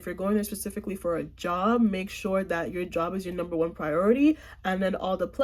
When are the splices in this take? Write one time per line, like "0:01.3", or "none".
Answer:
none

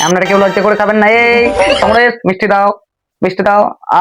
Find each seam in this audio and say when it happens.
none

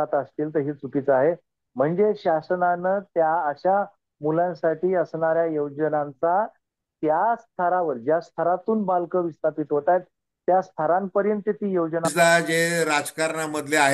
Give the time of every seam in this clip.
0:12.1

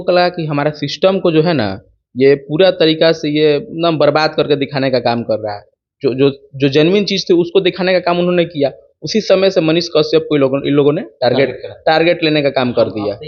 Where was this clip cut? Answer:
none

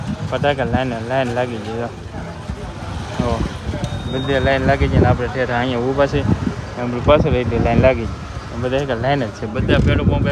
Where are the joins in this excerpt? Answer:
none

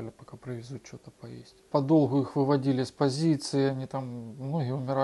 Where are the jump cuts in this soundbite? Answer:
0:01.5

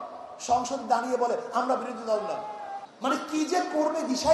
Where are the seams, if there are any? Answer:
0:02.8

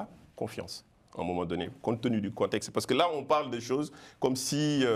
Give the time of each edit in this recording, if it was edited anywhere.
none

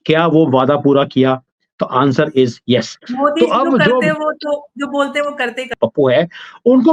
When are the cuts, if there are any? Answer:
0:05.8

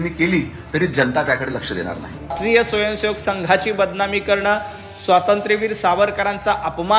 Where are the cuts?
0:02.3

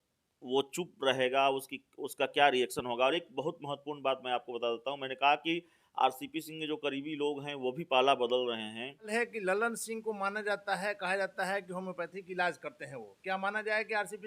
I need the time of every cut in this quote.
0:09.1

